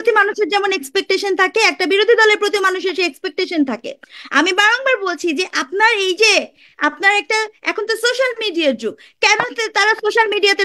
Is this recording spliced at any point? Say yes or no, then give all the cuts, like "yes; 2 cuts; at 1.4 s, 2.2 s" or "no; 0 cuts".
no; 0 cuts